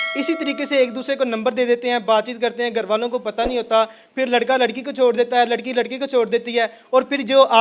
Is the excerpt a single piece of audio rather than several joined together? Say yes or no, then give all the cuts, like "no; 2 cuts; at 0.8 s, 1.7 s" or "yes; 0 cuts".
yes; 0 cuts